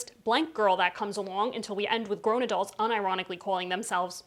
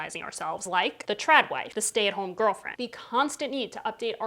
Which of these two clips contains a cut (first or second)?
second